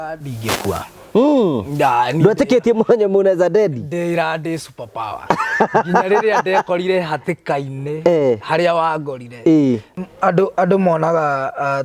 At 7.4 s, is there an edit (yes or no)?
no